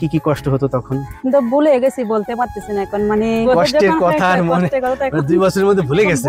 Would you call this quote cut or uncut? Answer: cut